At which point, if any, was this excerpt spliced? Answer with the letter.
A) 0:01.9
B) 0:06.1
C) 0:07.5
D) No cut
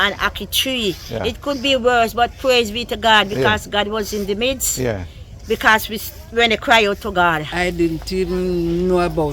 C